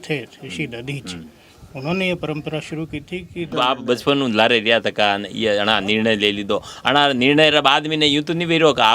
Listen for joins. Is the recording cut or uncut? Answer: cut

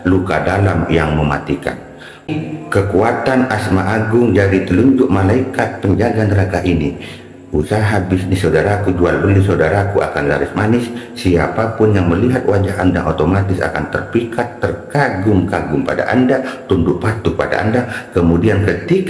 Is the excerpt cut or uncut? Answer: cut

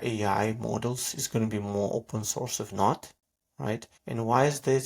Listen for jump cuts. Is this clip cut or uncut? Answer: cut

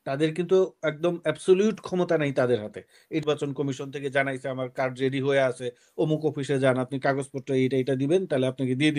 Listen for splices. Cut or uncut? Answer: cut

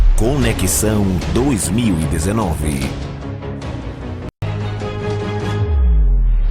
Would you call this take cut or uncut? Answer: uncut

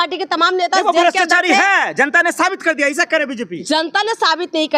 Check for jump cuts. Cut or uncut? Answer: uncut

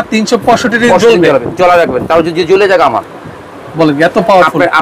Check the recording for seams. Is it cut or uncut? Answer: uncut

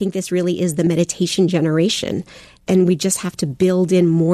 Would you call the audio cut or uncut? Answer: cut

